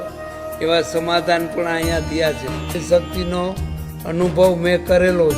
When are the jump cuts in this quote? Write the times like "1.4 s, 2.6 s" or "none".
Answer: 2.8 s